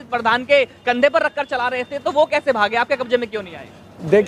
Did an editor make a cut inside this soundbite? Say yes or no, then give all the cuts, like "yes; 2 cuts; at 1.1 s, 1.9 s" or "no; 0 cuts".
no; 0 cuts